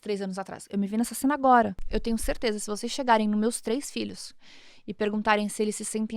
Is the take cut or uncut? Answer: cut